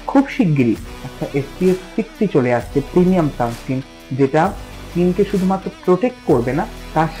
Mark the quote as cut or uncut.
cut